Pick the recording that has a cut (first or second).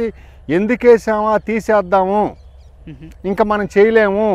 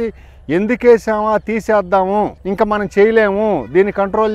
second